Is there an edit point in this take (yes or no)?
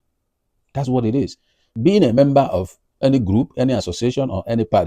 yes